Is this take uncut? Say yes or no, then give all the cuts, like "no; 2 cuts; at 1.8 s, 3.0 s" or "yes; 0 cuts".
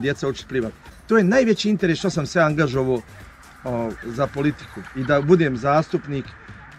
yes; 0 cuts